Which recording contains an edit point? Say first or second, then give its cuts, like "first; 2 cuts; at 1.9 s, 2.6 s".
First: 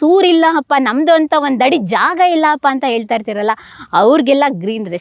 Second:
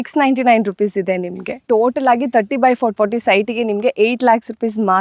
second; 1 cut; at 1.6 s